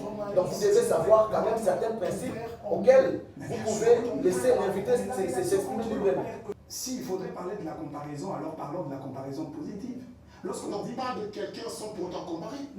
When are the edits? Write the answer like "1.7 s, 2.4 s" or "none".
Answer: 6.5 s

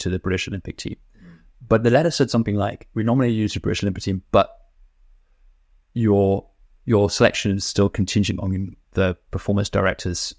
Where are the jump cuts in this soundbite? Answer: 6.7 s

